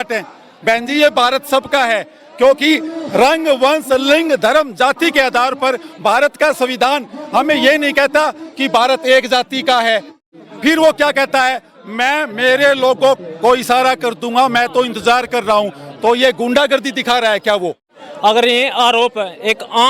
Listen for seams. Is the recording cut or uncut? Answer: cut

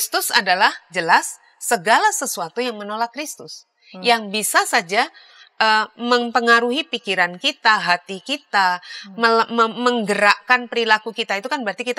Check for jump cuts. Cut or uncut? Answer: uncut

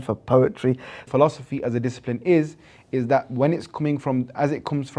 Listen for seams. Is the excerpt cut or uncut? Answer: cut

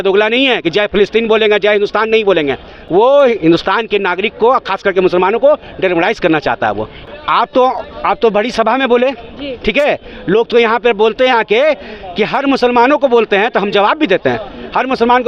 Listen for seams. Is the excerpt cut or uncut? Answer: uncut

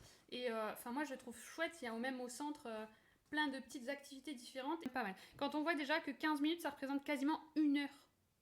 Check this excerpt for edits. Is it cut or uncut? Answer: cut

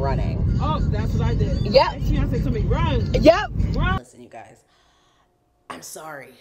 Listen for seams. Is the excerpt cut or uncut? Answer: cut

